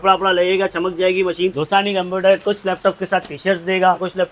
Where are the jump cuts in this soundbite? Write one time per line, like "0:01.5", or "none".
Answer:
0:01.5